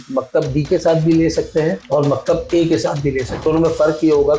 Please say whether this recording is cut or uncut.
cut